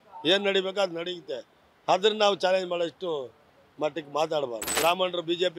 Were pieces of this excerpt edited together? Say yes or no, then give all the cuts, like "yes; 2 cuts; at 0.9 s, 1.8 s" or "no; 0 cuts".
yes; 1 cut; at 4.6 s